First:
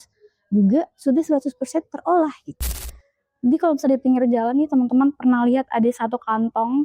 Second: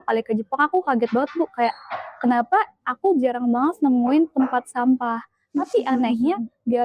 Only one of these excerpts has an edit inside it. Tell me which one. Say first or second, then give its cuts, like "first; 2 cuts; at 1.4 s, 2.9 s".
first; 1 cut; at 2.8 s